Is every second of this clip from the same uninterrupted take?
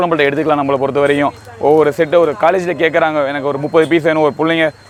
yes; 0 cuts

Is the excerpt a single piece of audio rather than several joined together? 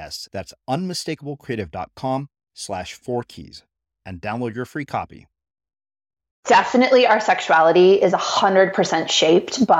no; 1 cut; at 6.4 s

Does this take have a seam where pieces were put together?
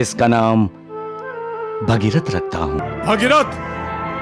yes; 1 cut; at 2.8 s

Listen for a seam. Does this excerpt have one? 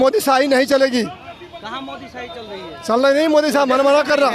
no; 0 cuts

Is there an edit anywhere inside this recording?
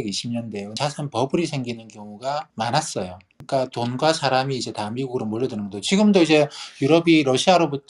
yes; 3 cuts; at 0.8 s, 2.5 s, 3.3 s

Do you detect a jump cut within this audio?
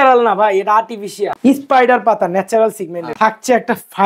yes; 2 cuts; at 1.3 s, 3.0 s

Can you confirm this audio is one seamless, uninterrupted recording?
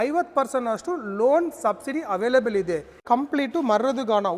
no; 1 cut; at 3.0 s

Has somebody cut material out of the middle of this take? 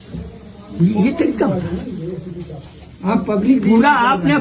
no; 0 cuts

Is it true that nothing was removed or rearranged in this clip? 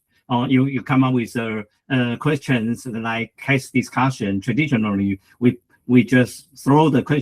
yes; 0 cuts

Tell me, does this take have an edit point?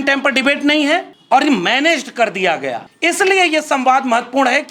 yes; 2 cuts; at 1.1 s, 2.9 s

